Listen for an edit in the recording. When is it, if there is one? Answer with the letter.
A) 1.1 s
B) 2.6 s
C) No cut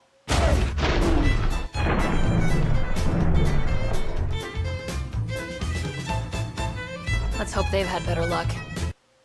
B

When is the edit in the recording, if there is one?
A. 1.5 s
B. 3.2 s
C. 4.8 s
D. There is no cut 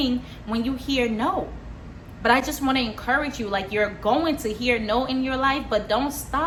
D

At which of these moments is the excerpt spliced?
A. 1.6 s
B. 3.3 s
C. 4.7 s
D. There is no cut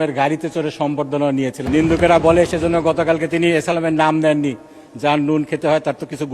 A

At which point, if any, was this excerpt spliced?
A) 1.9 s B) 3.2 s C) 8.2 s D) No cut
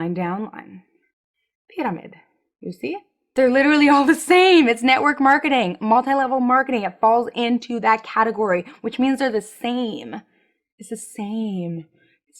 B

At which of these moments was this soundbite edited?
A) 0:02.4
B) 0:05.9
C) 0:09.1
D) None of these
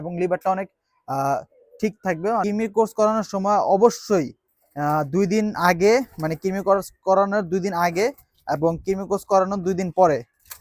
A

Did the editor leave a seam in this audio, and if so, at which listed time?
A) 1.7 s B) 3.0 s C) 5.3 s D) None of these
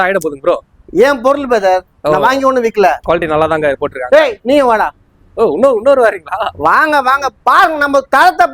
B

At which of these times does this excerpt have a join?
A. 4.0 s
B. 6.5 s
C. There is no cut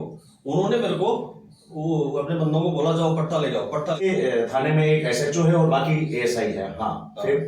A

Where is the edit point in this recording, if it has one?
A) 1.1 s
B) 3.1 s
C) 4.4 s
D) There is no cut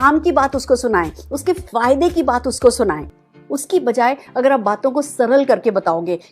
B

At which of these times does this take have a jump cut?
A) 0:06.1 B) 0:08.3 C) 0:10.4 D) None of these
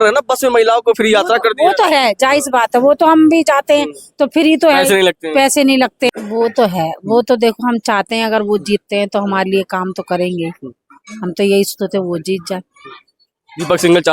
A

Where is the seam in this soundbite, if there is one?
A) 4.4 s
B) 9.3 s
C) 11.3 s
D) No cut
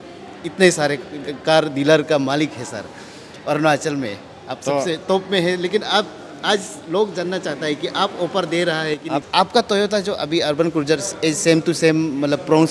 B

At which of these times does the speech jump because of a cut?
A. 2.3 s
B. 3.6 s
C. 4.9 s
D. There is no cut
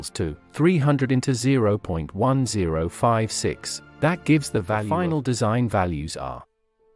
C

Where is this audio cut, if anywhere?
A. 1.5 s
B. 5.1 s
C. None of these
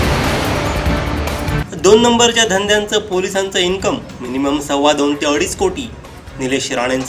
A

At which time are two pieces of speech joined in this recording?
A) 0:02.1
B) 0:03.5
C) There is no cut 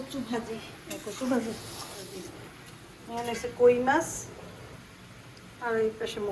A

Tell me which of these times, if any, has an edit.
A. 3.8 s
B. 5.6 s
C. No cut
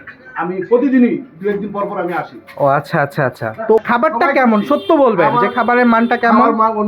A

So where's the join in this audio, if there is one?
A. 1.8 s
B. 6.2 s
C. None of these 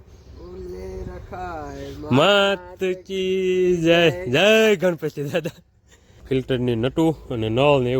B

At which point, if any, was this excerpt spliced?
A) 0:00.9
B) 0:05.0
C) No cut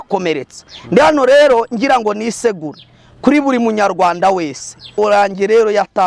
B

